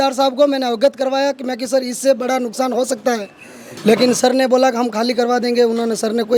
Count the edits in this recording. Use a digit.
0